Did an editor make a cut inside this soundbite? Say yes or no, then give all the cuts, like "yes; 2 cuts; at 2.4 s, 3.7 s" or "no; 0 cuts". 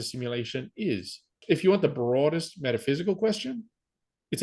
yes; 1 cut; at 1.4 s